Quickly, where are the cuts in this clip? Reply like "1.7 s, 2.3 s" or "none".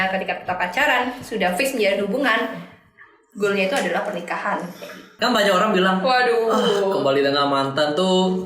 5.1 s